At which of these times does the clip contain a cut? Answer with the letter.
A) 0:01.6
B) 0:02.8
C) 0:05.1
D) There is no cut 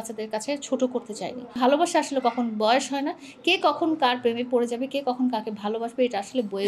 A